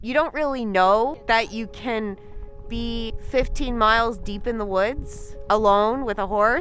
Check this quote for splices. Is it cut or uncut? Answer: cut